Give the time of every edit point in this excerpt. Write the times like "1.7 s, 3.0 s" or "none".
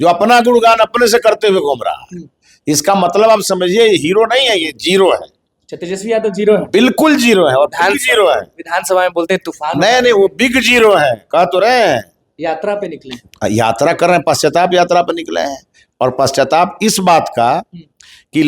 none